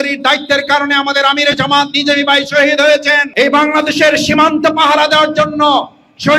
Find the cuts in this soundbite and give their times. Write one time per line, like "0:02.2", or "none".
0:03.3